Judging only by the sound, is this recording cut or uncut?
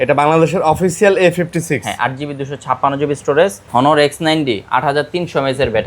cut